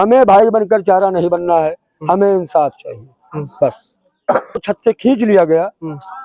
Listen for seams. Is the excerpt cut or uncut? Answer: cut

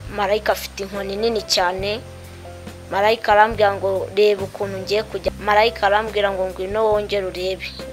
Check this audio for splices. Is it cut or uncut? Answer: cut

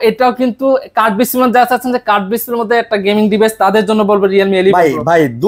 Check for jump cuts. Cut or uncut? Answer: uncut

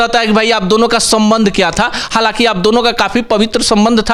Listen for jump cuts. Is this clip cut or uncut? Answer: uncut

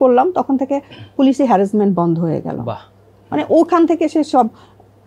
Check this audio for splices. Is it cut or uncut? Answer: uncut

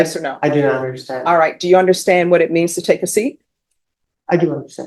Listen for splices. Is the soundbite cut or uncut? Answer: uncut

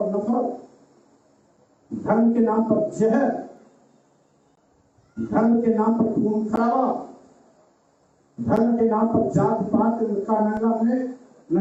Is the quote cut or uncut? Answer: uncut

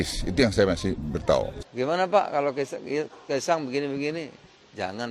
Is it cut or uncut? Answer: cut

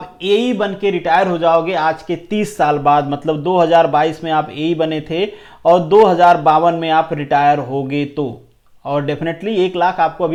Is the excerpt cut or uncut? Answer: uncut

